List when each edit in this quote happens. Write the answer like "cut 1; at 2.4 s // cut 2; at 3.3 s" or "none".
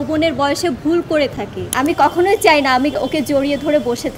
cut 1; at 1.6 s